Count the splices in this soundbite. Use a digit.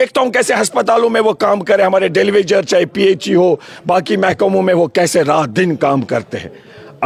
0